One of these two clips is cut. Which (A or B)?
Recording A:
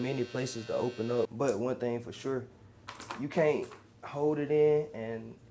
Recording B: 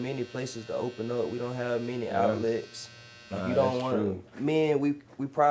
A